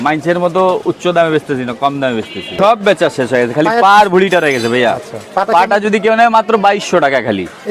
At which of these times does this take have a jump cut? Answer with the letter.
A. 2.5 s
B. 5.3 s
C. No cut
A